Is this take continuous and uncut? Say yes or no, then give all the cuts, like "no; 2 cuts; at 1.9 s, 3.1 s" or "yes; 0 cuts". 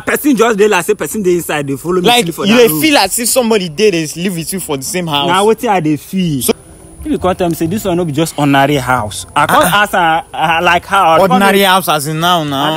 no; 1 cut; at 6.5 s